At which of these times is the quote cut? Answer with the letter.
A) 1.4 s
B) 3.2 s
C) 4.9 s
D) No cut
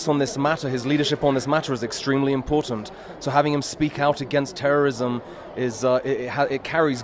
D